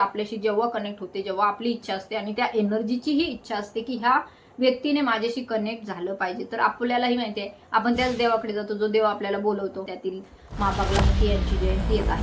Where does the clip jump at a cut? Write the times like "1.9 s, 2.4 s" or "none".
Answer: 9.9 s